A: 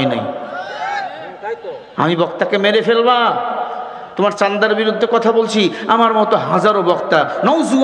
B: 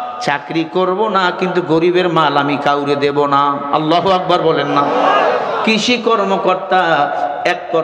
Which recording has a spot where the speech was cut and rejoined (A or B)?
A